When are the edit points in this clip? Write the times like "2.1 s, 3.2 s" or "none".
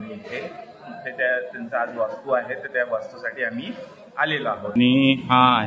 4.7 s

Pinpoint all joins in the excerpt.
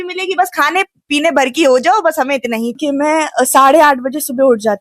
2.8 s

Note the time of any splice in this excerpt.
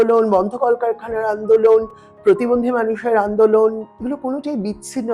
3.9 s

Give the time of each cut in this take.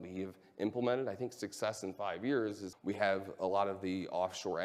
2.7 s

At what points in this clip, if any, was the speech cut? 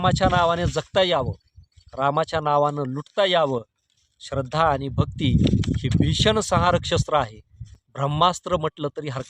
none

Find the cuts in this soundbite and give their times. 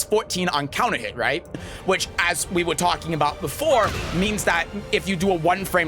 1.7 s

